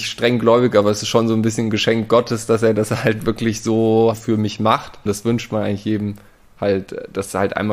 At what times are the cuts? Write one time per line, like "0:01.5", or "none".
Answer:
0:04.2
0:05.0